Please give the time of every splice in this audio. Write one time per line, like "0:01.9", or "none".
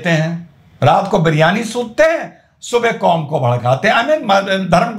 none